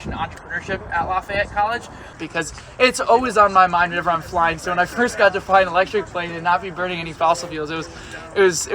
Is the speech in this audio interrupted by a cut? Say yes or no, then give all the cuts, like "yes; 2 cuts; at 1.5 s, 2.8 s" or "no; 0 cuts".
yes; 1 cut; at 2.1 s